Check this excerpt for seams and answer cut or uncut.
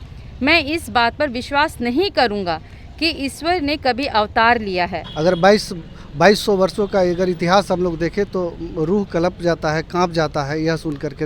cut